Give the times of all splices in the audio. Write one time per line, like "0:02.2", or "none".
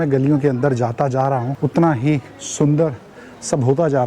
0:01.5